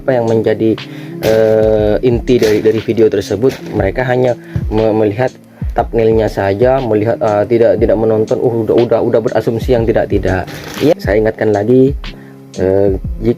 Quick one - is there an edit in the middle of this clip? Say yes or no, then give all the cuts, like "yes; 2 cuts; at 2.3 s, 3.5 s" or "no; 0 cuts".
yes; 1 cut; at 10.9 s